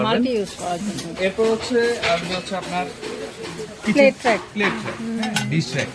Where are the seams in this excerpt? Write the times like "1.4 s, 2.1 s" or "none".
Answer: 1.1 s